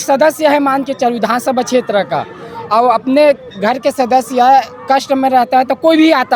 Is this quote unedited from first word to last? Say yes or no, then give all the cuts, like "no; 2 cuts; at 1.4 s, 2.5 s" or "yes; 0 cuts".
yes; 0 cuts